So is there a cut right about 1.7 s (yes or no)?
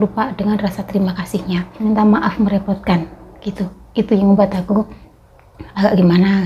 yes